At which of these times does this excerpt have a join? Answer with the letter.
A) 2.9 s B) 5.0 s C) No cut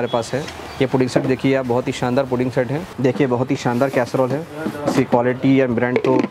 A